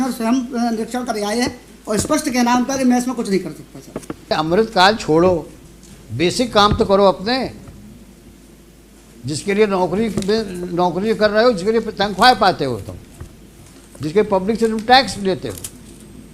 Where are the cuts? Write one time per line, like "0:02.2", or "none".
0:04.3